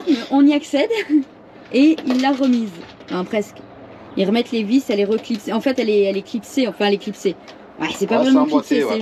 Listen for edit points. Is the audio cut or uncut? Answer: uncut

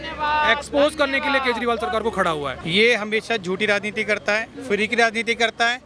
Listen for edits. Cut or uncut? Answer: cut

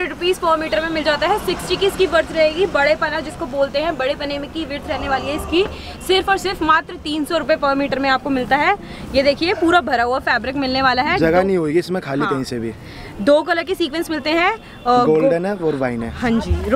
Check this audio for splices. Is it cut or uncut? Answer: uncut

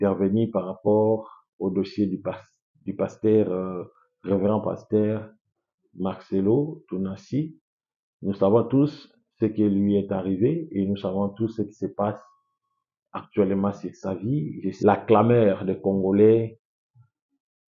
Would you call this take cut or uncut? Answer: cut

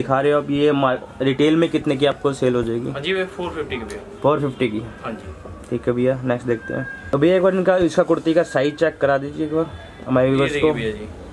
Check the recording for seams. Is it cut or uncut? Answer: cut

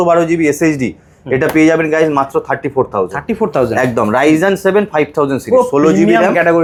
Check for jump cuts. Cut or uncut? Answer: uncut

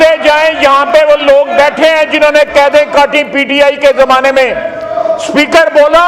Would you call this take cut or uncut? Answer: uncut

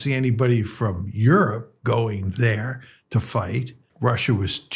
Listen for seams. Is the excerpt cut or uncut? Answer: cut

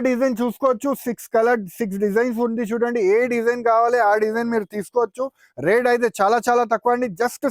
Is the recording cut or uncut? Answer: uncut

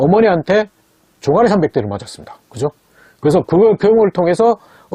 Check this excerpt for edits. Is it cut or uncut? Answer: uncut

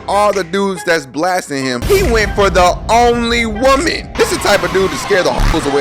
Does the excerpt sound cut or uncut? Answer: uncut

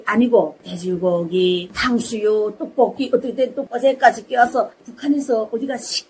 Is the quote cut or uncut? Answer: cut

